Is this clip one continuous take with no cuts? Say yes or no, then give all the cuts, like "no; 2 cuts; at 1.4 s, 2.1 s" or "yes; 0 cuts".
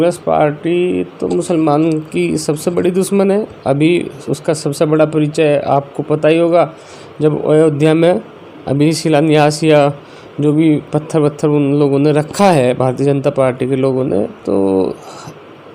yes; 0 cuts